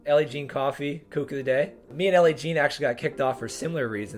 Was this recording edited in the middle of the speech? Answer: yes; 1 cut; at 1.8 s

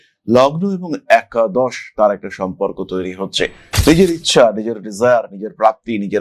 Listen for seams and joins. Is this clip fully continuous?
yes; 0 cuts

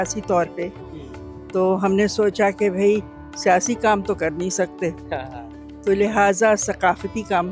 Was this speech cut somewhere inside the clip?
no; 0 cuts

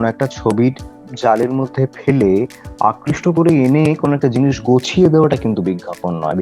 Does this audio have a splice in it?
no; 0 cuts

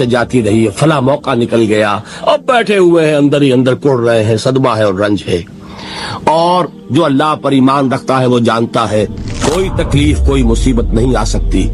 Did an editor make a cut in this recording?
yes; 1 cut; at 9.2 s

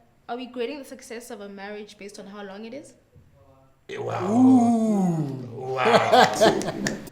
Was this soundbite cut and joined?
no; 0 cuts

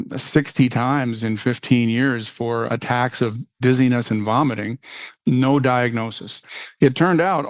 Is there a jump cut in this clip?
yes; 3 cuts; at 3.1 s, 5.1 s, 6.4 s

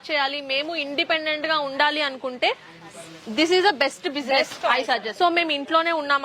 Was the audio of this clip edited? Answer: yes; 1 cut; at 5.1 s

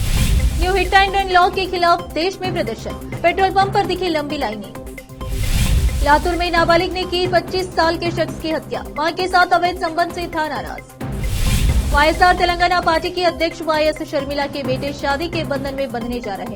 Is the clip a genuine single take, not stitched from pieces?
yes; 0 cuts

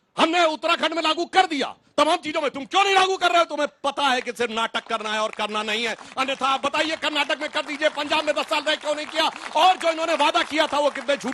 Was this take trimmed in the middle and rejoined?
no; 0 cuts

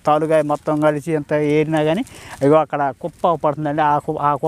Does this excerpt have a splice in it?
no; 0 cuts

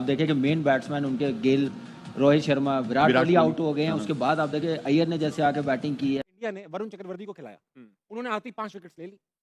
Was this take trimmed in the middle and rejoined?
yes; 1 cut; at 6.4 s

